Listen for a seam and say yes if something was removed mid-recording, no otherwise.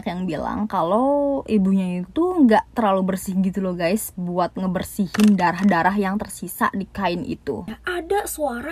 yes